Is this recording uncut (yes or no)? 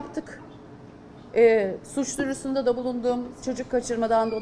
yes